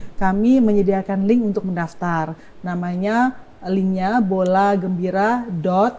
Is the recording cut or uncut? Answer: uncut